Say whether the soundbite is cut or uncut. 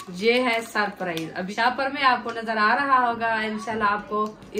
cut